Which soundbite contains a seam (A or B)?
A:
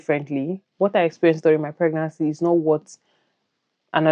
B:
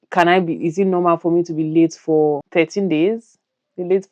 B